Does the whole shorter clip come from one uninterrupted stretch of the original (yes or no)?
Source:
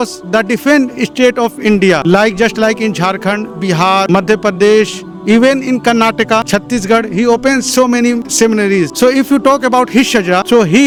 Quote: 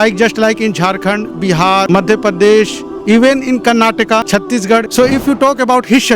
no